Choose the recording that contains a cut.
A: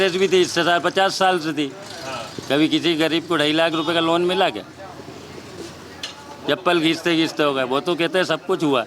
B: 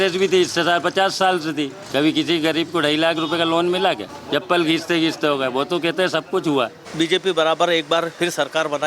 B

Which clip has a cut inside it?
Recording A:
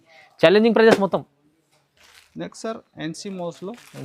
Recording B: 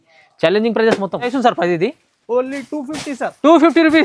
B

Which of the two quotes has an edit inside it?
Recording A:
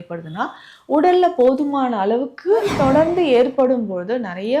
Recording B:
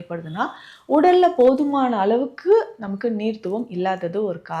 A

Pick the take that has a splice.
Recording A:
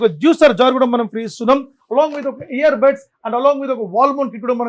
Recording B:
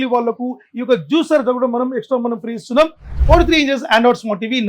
B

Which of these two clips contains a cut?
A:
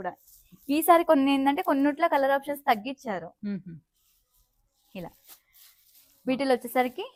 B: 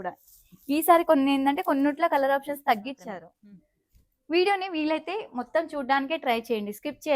B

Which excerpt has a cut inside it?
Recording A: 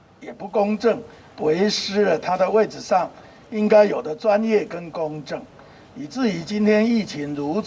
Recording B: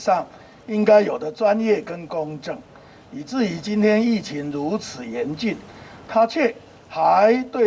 A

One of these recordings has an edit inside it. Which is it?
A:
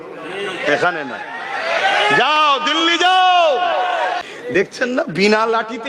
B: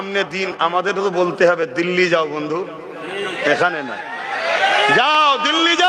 A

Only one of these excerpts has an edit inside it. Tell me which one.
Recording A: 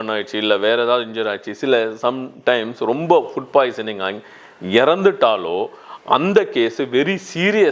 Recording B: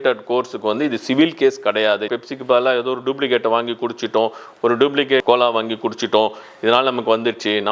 B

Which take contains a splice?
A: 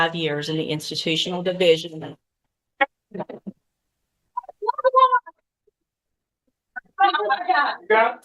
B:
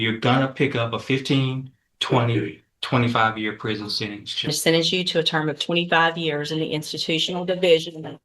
B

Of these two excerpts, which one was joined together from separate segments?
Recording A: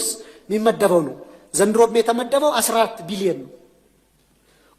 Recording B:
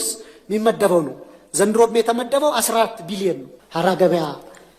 B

